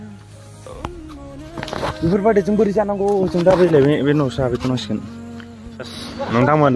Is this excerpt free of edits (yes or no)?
no